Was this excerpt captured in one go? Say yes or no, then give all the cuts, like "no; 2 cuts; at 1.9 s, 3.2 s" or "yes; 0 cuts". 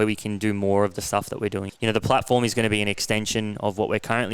no; 1 cut; at 1.7 s